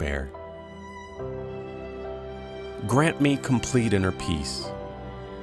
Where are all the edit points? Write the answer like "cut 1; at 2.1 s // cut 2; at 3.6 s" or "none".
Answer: cut 1; at 0.9 s // cut 2; at 2.8 s